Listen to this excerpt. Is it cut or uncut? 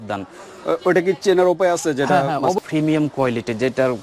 cut